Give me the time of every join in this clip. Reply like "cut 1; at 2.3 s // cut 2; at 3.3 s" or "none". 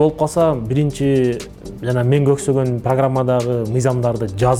none